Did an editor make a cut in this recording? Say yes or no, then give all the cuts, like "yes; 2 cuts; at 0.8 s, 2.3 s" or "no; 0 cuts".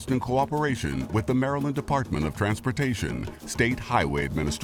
no; 0 cuts